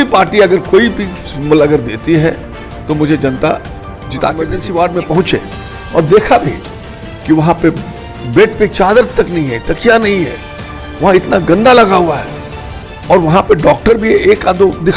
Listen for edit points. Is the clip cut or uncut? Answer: cut